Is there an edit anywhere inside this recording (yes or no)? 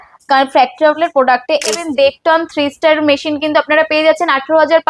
yes